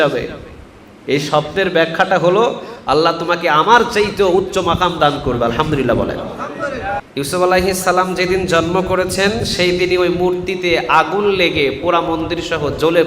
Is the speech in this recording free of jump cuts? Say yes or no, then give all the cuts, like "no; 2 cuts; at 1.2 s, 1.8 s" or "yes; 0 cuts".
no; 1 cut; at 7.0 s